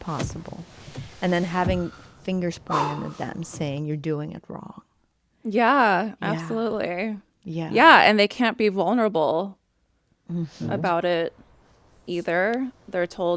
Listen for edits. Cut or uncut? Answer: uncut